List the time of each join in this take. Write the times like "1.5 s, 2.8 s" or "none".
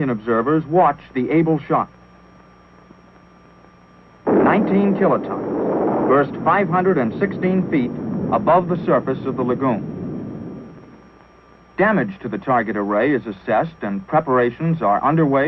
11.3 s